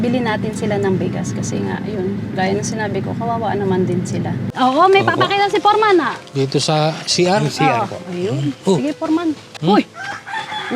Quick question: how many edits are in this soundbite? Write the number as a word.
two